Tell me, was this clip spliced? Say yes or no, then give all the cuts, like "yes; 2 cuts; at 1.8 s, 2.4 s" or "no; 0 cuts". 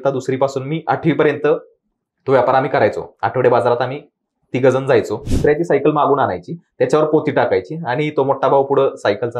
yes; 1 cut; at 5.3 s